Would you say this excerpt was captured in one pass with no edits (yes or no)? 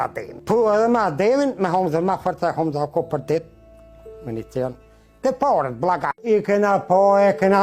no